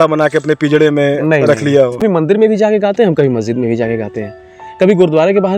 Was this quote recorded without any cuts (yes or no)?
no